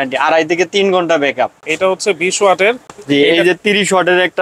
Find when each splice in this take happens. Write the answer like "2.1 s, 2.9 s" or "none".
1.6 s, 2.9 s